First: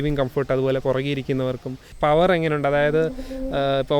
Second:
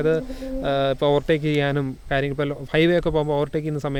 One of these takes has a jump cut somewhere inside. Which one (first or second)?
first